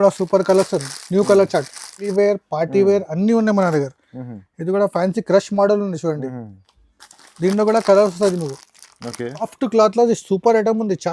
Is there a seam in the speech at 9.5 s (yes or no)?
yes